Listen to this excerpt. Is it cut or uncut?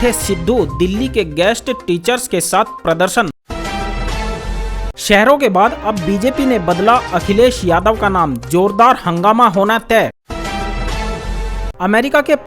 cut